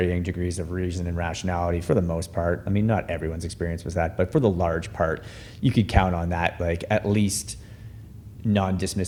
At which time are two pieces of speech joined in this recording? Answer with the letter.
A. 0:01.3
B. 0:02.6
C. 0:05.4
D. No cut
D